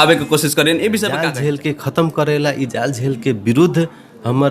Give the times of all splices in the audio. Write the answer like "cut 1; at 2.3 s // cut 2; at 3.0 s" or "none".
cut 1; at 1.3 s